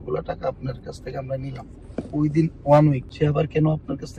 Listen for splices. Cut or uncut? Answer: cut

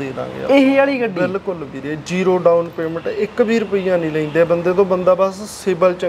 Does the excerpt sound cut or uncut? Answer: uncut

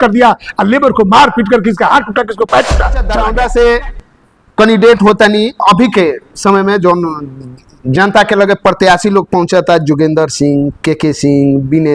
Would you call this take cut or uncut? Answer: cut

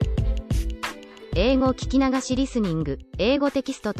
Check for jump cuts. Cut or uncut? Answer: uncut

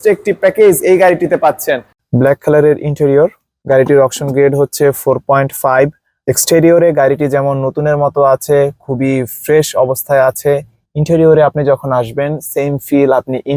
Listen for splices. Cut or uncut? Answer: cut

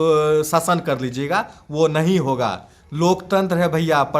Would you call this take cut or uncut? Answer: uncut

